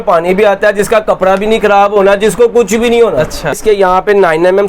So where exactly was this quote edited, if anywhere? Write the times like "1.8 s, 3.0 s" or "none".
3.6 s